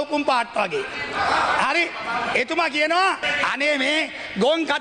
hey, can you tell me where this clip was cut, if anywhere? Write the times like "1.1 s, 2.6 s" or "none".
3.3 s

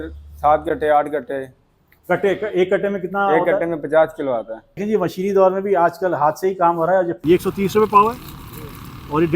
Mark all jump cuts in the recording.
4.8 s, 7.2 s

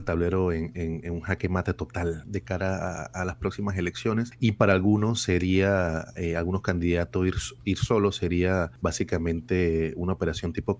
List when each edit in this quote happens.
2.2 s, 4.3 s, 8.7 s

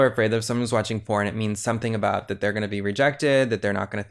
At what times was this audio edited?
none

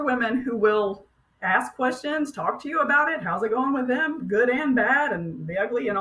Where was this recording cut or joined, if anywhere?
none

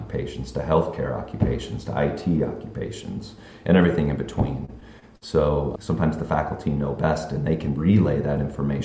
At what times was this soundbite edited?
5.7 s

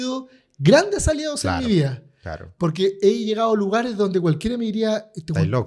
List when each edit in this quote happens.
none

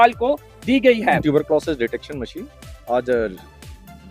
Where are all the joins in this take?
1.2 s

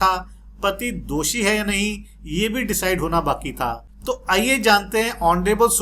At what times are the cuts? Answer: none

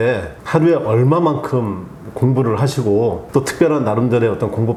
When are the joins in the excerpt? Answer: none

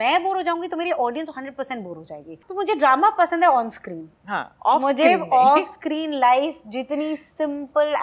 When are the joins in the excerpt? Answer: 2.4 s

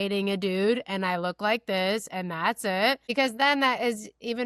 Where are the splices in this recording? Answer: 3.0 s

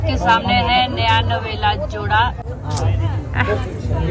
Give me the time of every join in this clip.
2.4 s

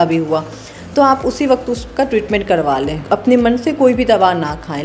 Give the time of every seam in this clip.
2.9 s

